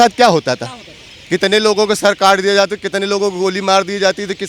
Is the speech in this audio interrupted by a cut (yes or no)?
no